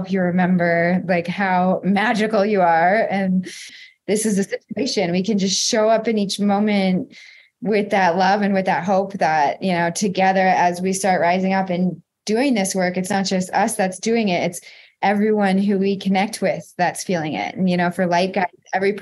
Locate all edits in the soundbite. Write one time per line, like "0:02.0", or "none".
0:03.7